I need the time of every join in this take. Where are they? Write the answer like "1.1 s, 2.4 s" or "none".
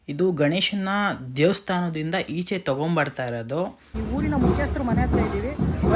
4.0 s

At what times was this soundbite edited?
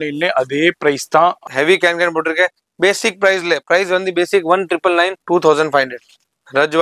1.4 s, 5.2 s

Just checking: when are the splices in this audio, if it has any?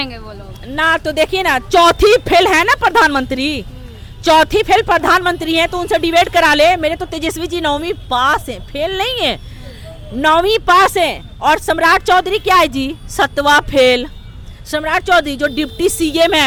none

